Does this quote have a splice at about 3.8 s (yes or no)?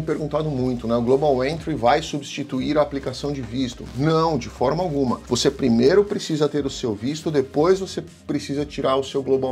no